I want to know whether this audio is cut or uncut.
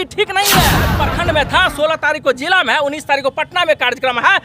cut